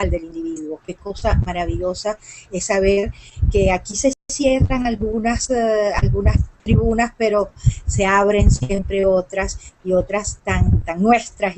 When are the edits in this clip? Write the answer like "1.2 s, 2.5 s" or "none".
6.0 s